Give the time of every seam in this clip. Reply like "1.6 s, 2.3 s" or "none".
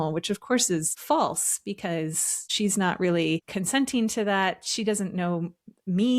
0.9 s, 2.5 s, 3.5 s